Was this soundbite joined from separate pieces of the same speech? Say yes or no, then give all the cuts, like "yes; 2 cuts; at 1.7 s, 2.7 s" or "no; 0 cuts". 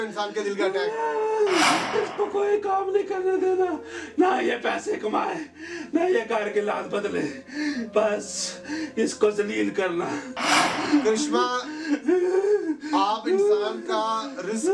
yes; 2 cuts; at 1.9 s, 10.7 s